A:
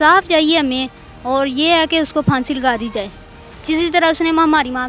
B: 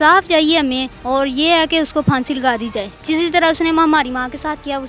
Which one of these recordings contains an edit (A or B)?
B